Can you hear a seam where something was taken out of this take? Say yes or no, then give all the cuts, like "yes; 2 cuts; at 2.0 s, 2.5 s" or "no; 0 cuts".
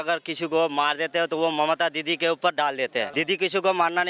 yes; 1 cut; at 3.1 s